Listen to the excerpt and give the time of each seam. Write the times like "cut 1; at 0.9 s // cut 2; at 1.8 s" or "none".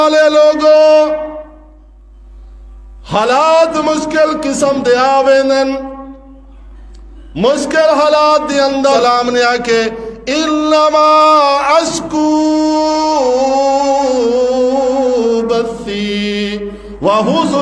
cut 1; at 9.0 s